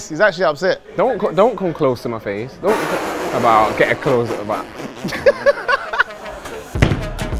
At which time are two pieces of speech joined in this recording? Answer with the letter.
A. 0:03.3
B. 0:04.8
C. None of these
C